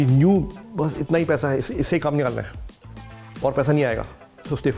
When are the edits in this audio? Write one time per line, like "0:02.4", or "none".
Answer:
none

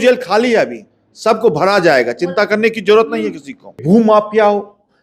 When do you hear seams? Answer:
0:03.8

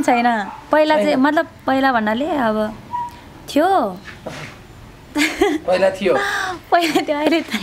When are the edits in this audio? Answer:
none

